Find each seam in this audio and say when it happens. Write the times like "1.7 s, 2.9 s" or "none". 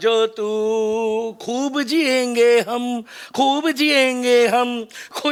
none